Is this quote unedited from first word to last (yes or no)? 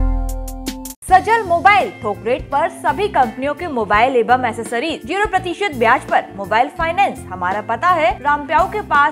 no